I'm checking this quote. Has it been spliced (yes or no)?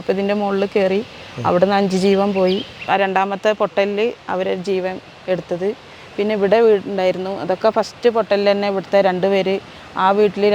yes